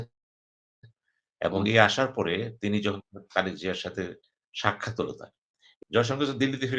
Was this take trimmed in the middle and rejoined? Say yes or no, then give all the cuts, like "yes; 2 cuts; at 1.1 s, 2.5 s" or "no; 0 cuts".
yes; 1 cut; at 5.7 s